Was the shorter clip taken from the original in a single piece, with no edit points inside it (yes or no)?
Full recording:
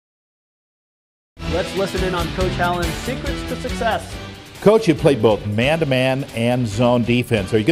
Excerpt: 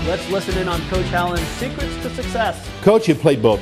no